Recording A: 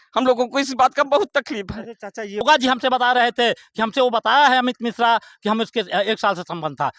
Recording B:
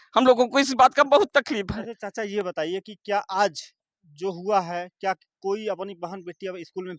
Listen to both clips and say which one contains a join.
A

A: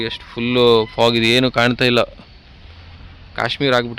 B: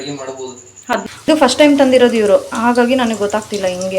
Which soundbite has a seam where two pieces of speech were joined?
B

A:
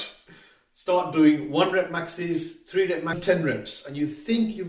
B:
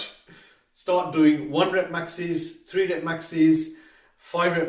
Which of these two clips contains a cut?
A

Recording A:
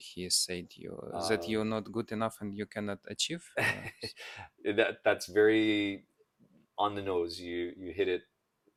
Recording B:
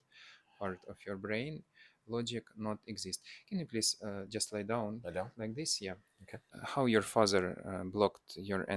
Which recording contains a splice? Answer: B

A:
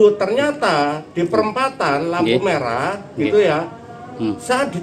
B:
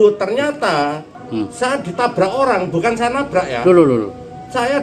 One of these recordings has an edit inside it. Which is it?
B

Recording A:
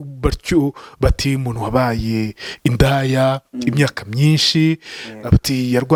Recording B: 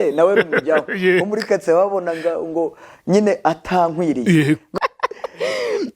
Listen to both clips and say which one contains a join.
B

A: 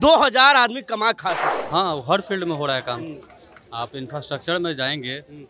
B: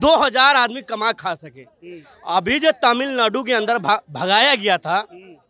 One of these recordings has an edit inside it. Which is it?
A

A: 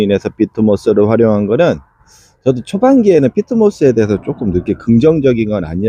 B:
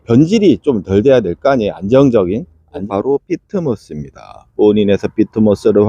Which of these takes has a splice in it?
B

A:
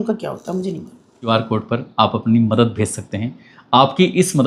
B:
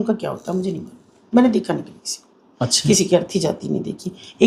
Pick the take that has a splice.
A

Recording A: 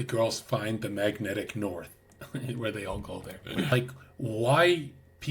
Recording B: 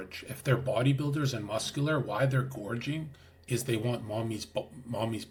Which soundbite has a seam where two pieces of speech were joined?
A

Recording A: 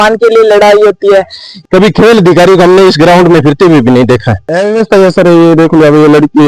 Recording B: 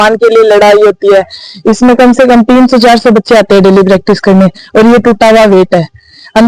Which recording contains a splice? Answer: A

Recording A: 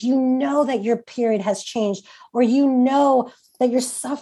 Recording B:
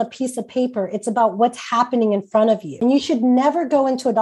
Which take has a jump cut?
B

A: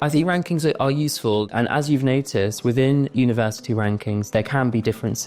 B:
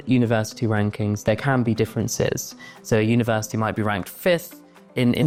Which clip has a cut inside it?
A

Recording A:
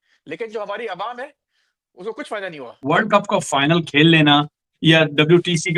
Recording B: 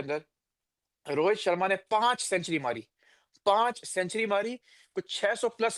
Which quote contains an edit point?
A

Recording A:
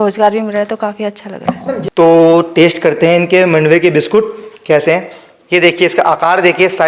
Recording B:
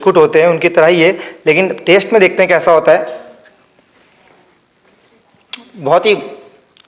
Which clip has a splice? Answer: A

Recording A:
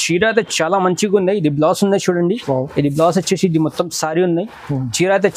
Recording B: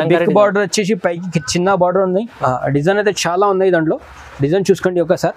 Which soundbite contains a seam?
B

